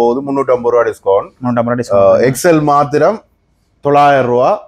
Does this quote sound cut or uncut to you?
uncut